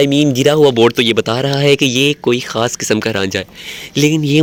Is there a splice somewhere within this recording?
no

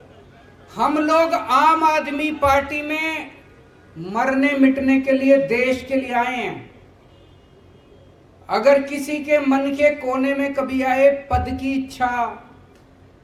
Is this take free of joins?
yes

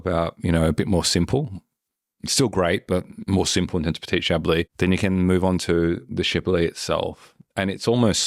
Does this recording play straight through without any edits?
yes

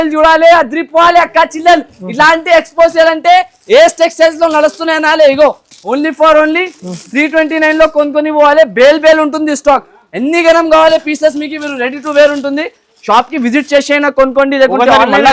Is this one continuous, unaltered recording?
yes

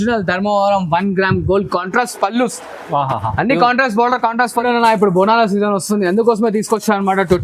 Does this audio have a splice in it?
yes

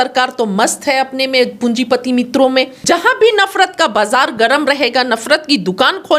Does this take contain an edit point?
yes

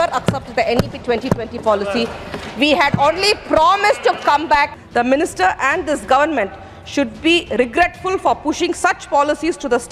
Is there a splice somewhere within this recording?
yes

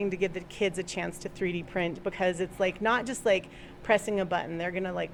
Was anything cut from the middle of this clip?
no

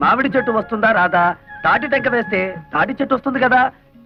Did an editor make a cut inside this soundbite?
no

